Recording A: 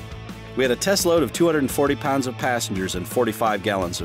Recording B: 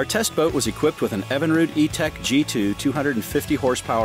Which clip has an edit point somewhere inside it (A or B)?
B